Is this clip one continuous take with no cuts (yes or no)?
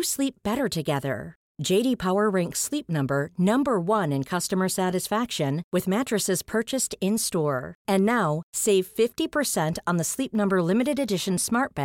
yes